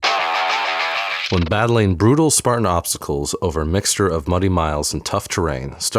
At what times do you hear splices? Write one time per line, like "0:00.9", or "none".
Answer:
0:01.2